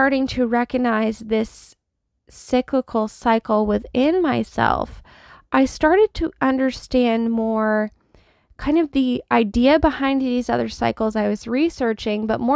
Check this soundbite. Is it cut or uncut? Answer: uncut